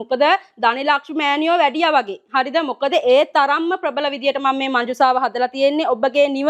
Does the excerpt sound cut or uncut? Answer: uncut